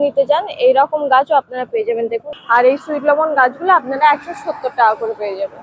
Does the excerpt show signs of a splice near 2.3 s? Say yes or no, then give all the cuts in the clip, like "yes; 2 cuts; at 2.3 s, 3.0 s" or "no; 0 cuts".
yes; 1 cut; at 2.3 s